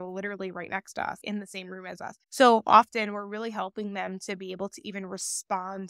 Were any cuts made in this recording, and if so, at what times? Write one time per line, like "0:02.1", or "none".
none